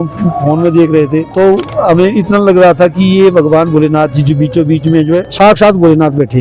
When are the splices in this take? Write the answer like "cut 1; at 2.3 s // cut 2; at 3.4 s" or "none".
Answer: cut 1; at 1.3 s // cut 2; at 5.3 s